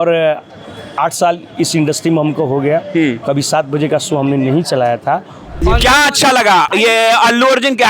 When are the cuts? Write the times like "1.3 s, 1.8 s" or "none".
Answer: 5.6 s, 6.7 s